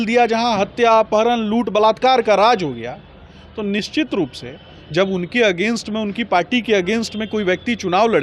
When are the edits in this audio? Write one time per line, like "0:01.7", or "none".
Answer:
none